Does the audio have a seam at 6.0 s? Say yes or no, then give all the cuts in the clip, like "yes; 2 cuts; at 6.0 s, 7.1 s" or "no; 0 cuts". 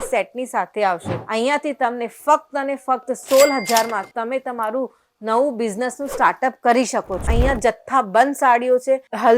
no; 2 cuts; at 1.1 s, 7.3 s